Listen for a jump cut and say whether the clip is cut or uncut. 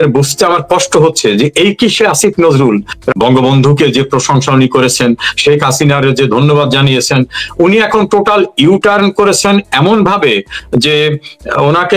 cut